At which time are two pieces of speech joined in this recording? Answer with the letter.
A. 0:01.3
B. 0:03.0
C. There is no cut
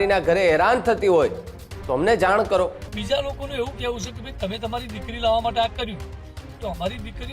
B